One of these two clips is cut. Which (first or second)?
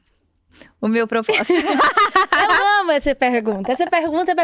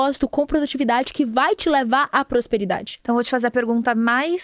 second